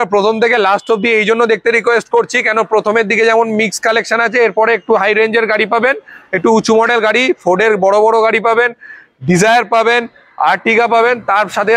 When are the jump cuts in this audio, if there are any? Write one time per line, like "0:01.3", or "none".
none